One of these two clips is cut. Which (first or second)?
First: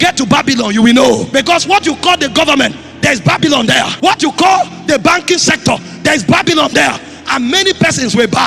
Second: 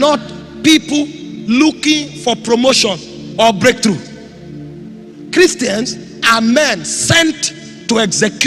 first